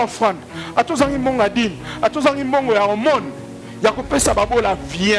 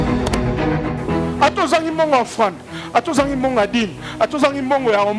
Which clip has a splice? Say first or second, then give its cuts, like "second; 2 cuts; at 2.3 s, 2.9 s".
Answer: second; 1 cut; at 0.9 s